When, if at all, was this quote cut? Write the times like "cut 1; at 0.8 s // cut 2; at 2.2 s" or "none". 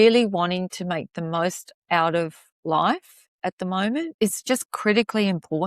cut 1; at 4.1 s

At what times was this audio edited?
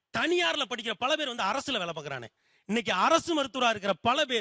none

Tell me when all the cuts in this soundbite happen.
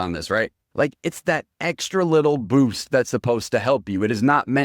none

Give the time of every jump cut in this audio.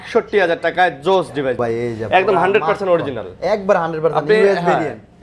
cut 1; at 1.6 s

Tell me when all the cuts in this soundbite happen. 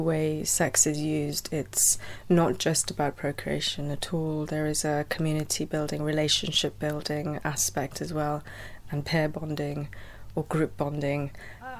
none

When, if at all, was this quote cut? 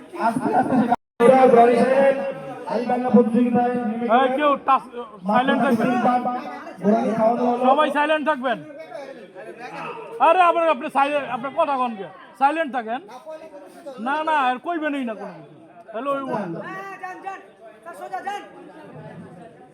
cut 1; at 1.0 s

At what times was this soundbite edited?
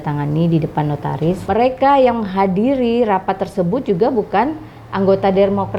cut 1; at 1.4 s

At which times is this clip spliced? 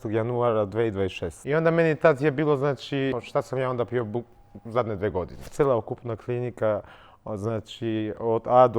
cut 1; at 3.1 s // cut 2; at 5.5 s

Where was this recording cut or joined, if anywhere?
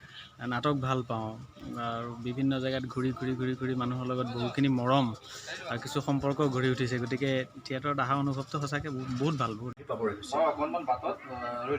cut 1; at 9.7 s

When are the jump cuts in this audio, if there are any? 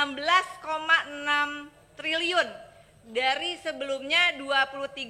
cut 1; at 3.0 s

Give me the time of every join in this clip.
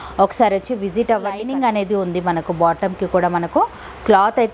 cut 1; at 1.4 s

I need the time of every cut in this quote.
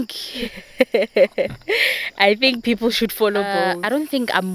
cut 1; at 3.6 s

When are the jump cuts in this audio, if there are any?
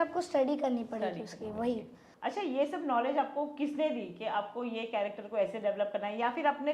cut 1; at 2.0 s

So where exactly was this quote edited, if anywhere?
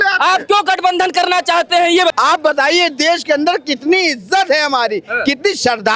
cut 1; at 2.1 s

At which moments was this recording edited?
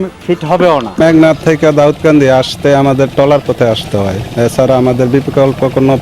cut 1; at 1.0 s

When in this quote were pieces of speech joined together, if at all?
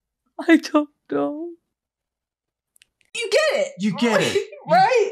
cut 1; at 3.2 s

